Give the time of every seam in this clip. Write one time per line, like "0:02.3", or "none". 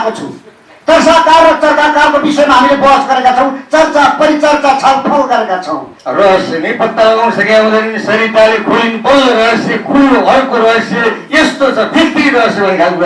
0:05.9